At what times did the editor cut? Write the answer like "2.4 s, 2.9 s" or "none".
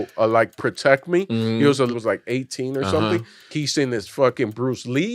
1.9 s, 3.5 s